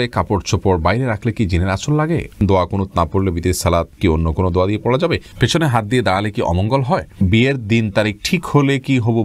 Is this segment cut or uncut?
cut